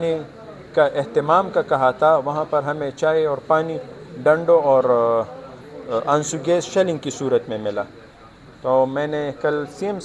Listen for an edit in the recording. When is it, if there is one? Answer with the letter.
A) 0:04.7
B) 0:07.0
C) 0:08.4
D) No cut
D